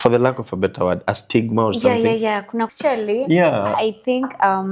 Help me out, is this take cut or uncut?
cut